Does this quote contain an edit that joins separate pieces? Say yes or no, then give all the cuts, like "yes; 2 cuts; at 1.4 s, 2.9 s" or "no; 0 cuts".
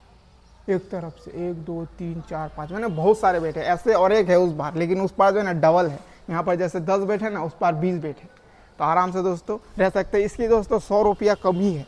no; 0 cuts